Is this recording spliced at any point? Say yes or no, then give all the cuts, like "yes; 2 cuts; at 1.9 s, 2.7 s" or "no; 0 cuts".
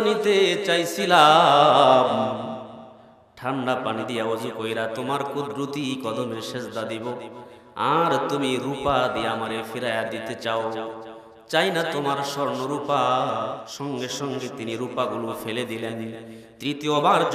yes; 1 cut; at 13.7 s